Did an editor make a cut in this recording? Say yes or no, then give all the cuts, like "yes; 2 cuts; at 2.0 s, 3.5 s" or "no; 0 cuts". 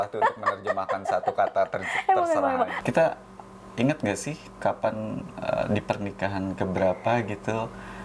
yes; 1 cut; at 2.8 s